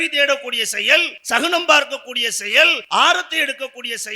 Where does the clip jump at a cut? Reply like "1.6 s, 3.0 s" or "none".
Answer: 1.2 s, 2.8 s